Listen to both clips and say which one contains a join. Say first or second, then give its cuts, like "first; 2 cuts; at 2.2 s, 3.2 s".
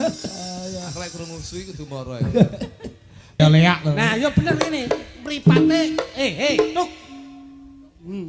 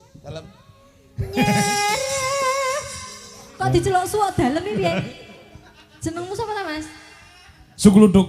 first; 1 cut; at 3.4 s